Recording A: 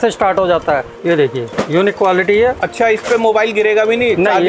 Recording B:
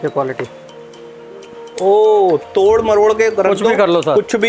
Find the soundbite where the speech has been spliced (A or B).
A